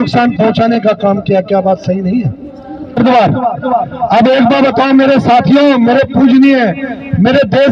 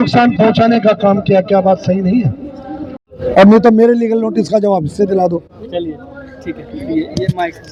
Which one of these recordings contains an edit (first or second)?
first